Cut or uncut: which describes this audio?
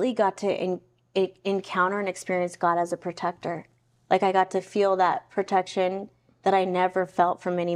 uncut